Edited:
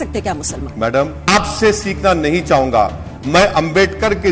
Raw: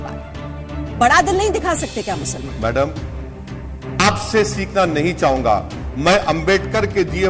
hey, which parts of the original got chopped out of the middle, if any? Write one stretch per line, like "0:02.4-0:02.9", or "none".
0:03.0-0:03.9